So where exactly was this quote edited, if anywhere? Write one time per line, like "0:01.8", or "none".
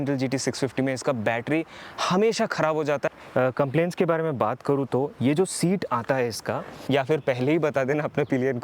0:03.1
0:06.8

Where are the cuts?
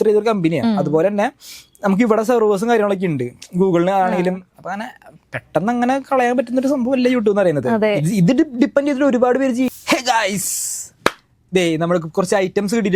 0:09.7

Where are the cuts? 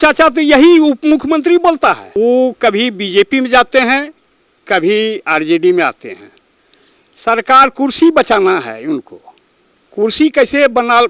0:02.1

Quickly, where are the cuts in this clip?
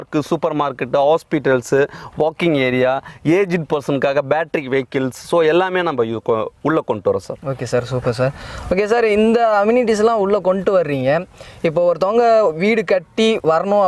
none

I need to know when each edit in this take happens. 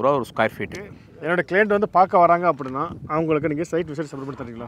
0:01.0

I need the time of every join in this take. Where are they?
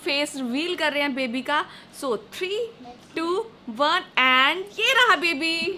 none

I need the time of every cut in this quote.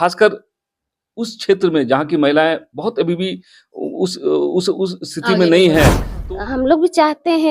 0:06.1

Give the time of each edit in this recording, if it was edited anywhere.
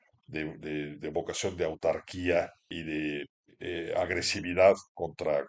0:02.7
0:03.4

